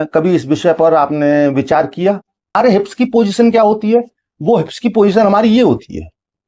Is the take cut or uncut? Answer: cut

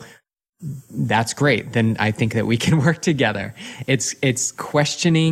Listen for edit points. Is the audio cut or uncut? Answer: uncut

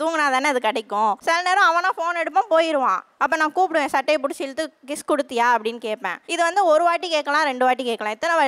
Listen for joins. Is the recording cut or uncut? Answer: cut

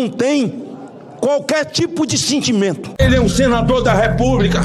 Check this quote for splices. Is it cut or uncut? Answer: cut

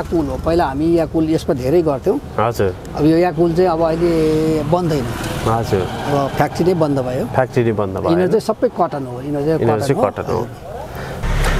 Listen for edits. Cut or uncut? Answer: uncut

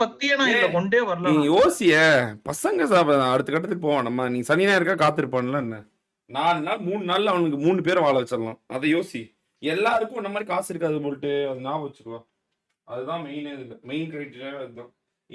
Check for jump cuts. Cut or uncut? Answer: uncut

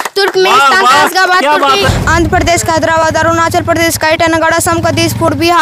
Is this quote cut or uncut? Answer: cut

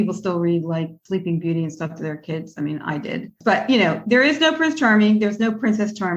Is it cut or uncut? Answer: cut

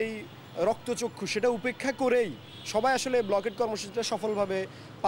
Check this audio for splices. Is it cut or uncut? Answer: uncut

